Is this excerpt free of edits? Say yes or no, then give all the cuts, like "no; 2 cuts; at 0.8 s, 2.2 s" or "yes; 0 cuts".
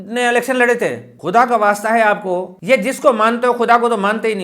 no; 1 cut; at 1.1 s